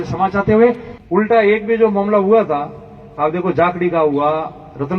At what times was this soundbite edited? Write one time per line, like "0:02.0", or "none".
0:01.0